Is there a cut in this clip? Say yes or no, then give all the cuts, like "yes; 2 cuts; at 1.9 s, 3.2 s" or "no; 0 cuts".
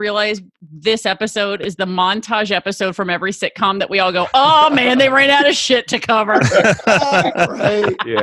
no; 0 cuts